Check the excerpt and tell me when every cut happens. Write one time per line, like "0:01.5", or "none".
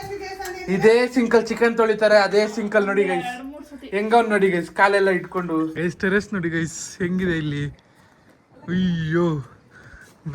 0:05.7